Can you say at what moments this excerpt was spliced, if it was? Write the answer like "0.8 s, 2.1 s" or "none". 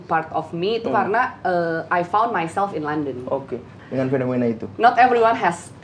3.7 s